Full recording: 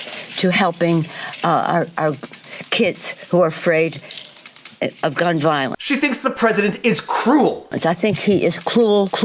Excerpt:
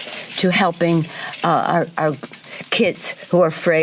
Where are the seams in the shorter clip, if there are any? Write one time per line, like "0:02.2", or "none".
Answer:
none